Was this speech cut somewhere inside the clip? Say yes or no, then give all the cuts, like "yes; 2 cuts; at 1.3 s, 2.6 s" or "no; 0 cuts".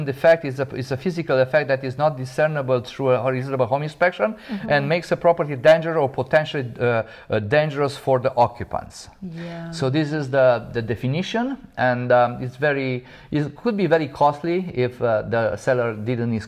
no; 0 cuts